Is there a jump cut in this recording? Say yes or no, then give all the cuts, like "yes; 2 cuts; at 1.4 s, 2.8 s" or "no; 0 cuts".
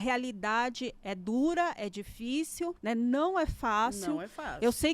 yes; 1 cut; at 2.8 s